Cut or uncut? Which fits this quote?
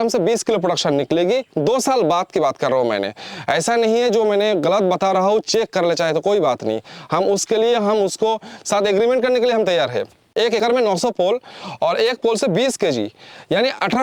cut